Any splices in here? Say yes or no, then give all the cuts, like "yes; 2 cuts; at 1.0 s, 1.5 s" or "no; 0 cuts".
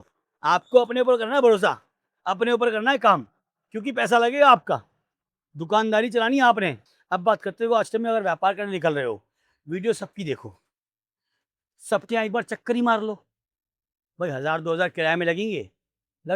yes; 1 cut; at 6.8 s